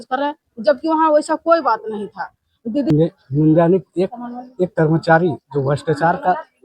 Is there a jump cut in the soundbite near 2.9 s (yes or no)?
yes